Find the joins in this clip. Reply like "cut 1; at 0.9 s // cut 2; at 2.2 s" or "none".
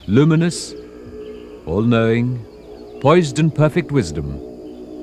cut 1; at 4.1 s